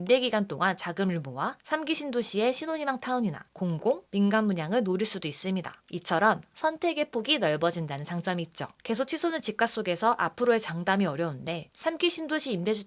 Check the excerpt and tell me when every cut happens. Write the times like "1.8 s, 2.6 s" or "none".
5.8 s